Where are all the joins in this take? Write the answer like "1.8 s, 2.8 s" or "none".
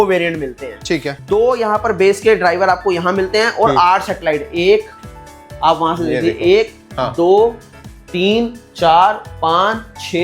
1.1 s